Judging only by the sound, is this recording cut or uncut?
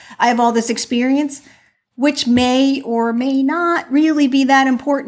uncut